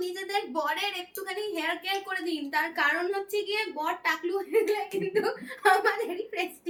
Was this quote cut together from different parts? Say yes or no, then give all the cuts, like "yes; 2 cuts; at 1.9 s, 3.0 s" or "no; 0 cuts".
no; 0 cuts